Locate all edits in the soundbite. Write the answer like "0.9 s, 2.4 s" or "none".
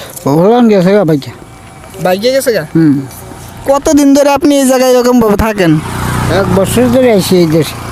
none